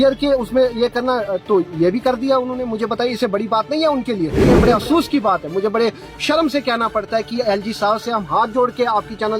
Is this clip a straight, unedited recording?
no; 1 cut; at 4.5 s

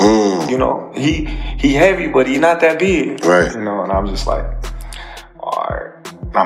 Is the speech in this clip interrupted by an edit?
no; 0 cuts

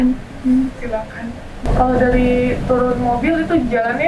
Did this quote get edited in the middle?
yes; 1 cut; at 1.5 s

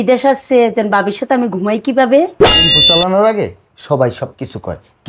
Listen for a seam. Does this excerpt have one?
yes; 1 cut; at 2.8 s

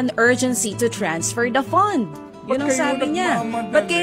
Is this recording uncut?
yes; 0 cuts

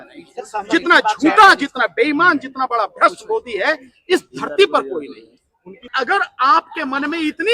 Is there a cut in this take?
yes; 1 cut; at 5.9 s

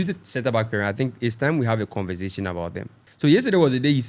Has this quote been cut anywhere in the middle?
yes; 1 cut; at 3.0 s

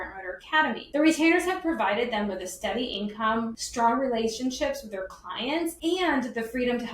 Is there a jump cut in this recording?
yes; 2 cuts; at 3.6 s, 5.8 s

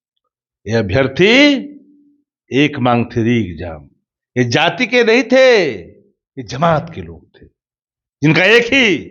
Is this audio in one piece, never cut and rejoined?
yes; 0 cuts

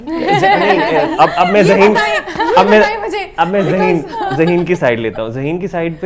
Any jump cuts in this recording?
no; 0 cuts

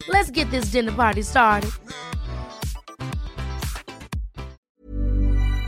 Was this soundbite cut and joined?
yes; 1 cut; at 4.7 s

